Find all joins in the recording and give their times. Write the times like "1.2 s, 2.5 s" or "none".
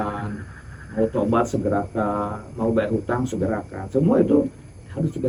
none